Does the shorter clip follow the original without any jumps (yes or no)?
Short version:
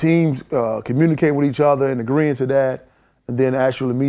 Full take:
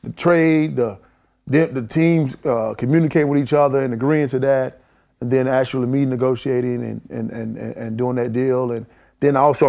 yes